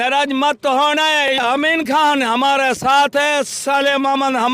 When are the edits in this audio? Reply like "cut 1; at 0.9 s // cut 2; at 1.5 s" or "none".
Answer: cut 1; at 1.3 s